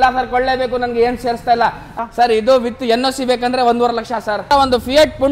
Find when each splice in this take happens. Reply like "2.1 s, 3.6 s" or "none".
1.9 s, 4.5 s